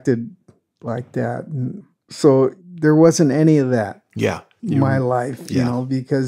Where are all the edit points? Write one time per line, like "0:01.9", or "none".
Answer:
0:04.5